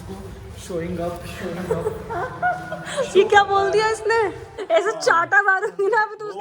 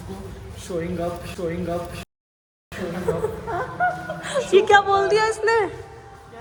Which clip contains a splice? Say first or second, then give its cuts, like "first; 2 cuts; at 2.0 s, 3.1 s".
first; 2 cuts; at 1.3 s, 4.5 s